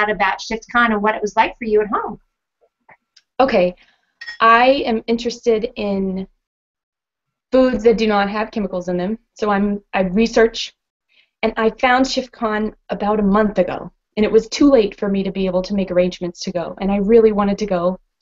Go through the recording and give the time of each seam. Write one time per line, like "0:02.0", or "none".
0:01.9